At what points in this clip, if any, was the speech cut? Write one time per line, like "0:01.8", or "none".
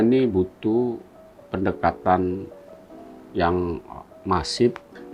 none